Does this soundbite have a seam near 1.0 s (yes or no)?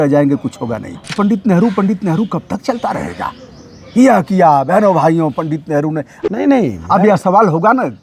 yes